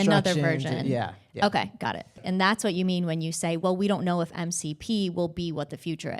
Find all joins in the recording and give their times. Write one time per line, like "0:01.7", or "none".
0:02.2